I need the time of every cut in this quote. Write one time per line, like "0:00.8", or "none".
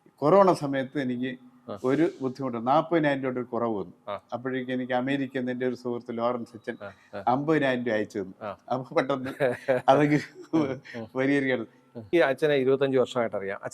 0:12.1